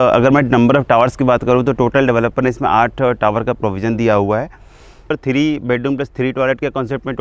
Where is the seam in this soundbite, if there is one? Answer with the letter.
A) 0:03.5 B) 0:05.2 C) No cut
B